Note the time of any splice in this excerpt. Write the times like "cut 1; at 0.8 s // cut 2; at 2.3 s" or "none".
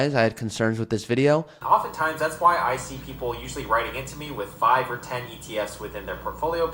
cut 1; at 1.6 s